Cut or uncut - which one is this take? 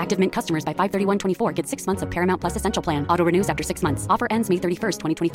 uncut